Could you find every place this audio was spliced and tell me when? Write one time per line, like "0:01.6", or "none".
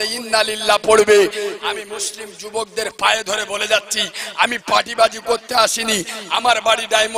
none